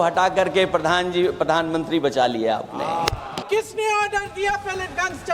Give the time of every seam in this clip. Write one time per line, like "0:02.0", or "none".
0:03.3